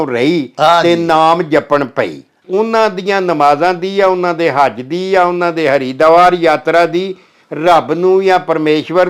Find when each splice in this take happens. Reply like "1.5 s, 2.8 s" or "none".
2.4 s